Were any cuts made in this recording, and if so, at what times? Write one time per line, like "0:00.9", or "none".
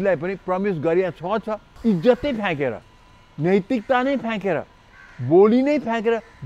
0:01.6

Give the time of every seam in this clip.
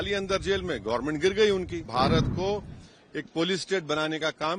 0:01.9

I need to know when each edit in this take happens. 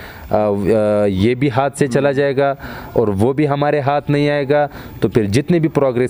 none

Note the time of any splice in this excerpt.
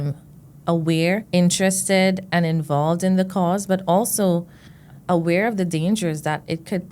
0:05.0

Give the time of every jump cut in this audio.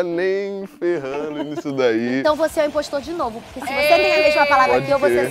none

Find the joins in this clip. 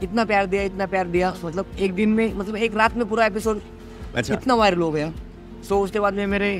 none

